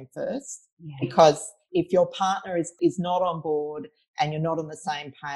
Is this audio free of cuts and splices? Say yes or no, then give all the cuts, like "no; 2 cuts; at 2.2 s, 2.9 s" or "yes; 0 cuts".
no; 2 cuts; at 1.6 s, 2.7 s